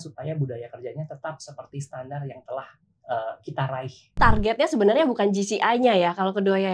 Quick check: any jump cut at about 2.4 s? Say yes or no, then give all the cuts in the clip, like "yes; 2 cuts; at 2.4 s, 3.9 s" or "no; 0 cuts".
no; 1 cut; at 4.2 s